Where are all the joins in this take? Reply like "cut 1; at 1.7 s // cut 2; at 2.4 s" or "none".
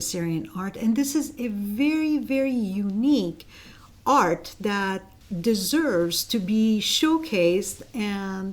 none